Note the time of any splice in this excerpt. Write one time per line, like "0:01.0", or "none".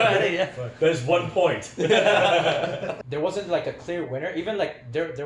0:03.0